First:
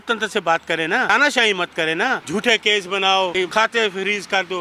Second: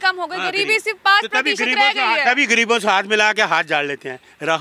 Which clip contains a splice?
first; 3 cuts; at 1.1 s, 2.2 s, 3.4 s

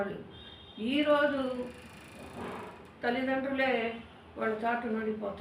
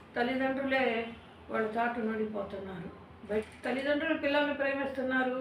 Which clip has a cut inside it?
second; 1 cut; at 3.4 s

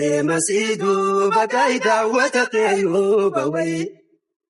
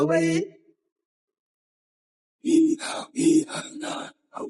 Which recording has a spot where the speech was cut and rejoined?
first; 1 cut; at 2.4 s

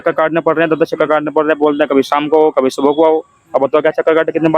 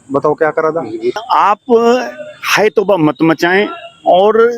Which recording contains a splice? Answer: second; 1 cut; at 1.2 s

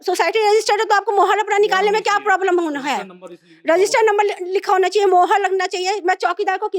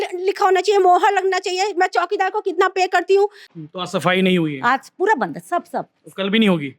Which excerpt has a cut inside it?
second; 1 cut; at 3.4 s

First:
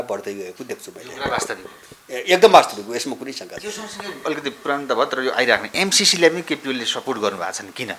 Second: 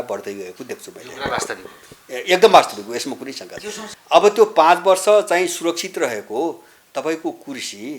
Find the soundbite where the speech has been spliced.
second; 1 cut; at 3.9 s

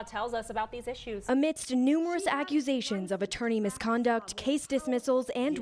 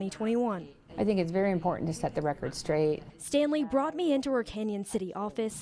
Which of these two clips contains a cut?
first; 1 cut; at 1.2 s

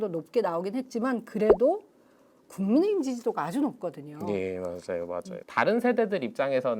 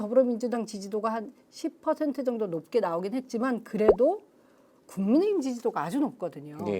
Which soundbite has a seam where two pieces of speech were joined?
first; 1 cut; at 5.4 s

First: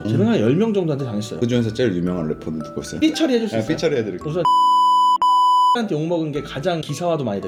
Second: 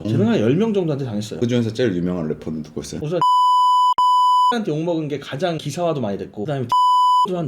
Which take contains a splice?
second; 2 cuts; at 2.9 s, 6.5 s

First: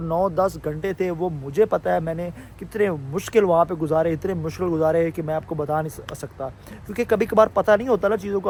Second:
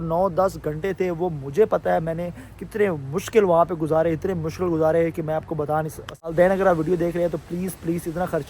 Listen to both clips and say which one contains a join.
second; 1 cut; at 6.3 s

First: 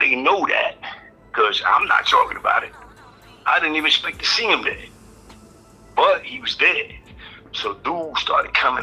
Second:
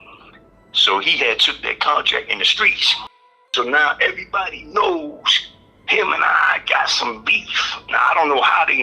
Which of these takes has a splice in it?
second; 1 cut; at 3.4 s

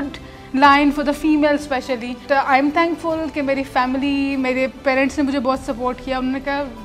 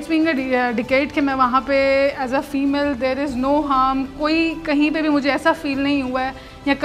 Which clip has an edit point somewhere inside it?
first; 1 cut; at 2.2 s

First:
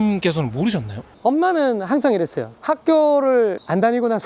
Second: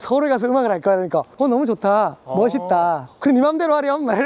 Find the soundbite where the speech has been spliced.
first; 2 cuts; at 1.0 s, 2.5 s

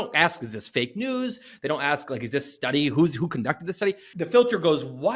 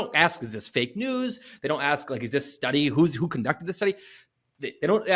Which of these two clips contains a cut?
first; 1 cut; at 4.2 s

